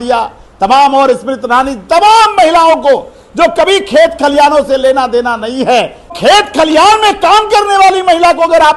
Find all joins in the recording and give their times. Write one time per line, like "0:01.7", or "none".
0:06.1